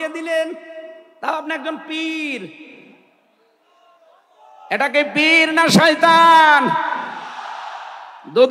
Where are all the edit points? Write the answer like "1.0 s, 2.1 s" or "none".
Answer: none